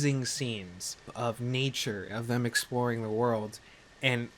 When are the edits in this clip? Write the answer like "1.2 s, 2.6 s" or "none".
1.1 s